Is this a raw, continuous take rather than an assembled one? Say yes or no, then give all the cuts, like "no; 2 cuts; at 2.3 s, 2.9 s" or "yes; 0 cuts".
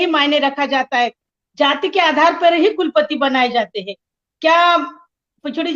no; 1 cut; at 1.3 s